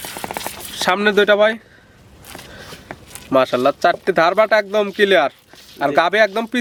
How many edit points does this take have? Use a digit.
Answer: 0